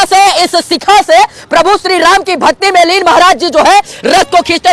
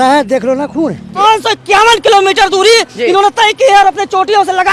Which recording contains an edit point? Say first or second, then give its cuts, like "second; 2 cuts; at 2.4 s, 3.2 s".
second; 1 cut; at 1.2 s